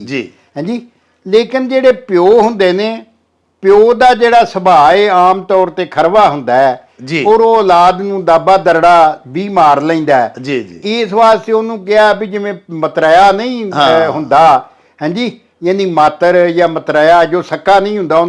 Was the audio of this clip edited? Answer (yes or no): no